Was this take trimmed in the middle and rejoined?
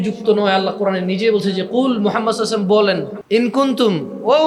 yes; 1 cut; at 3.1 s

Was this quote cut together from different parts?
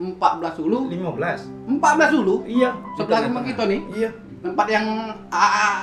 no; 0 cuts

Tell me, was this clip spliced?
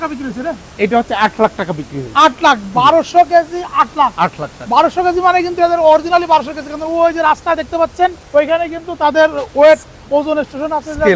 no; 0 cuts

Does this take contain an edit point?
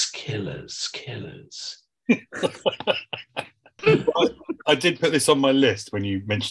no; 0 cuts

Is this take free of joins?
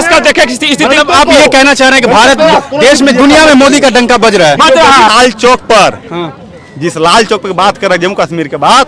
no; 1 cut; at 5.1 s

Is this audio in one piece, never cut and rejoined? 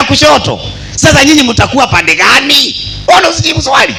yes; 0 cuts

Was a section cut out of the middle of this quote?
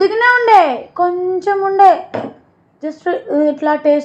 no; 0 cuts

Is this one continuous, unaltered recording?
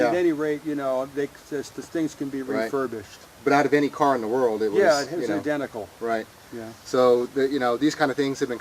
no; 1 cut; at 5.4 s

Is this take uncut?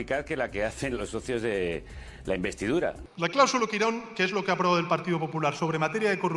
no; 1 cut; at 3.1 s

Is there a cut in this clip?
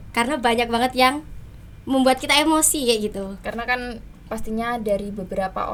no; 0 cuts

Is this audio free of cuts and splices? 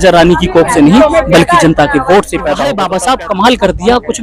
yes; 0 cuts

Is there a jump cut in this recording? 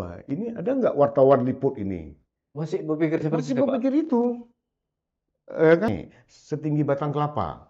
yes; 1 cut; at 5.9 s

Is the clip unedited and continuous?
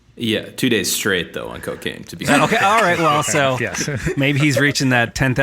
no; 1 cut; at 2.3 s

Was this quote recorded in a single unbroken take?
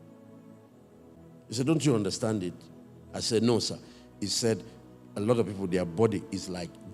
no; 1 cut; at 1.2 s

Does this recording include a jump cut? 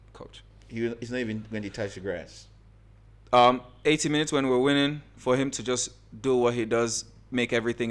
no; 0 cuts

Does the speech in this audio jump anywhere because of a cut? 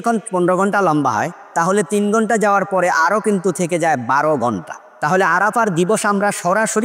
no; 0 cuts

